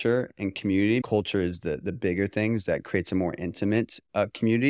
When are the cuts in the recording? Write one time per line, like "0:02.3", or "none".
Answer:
0:01.0